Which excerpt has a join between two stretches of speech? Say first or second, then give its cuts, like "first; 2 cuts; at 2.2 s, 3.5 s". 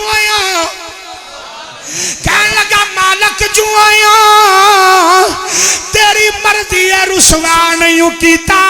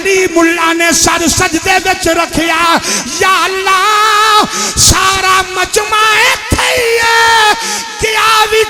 first; 1 cut; at 2.1 s